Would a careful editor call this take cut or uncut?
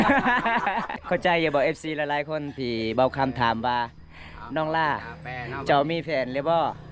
cut